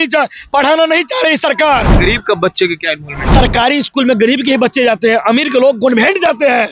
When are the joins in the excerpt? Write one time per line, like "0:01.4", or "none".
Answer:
0:01.9
0:03.3